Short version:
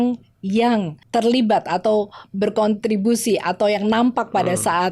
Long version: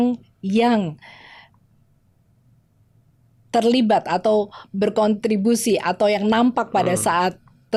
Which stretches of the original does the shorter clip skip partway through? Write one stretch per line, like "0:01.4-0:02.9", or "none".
0:01.0-0:03.4